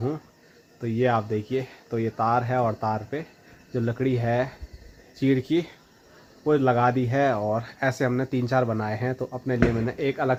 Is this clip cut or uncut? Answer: uncut